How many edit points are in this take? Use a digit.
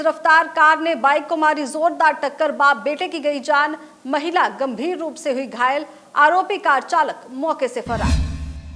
0